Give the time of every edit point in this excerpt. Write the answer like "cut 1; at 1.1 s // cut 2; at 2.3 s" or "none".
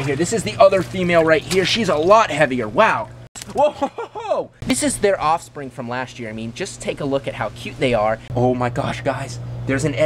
cut 1; at 3.3 s // cut 2; at 4.6 s // cut 3; at 8.3 s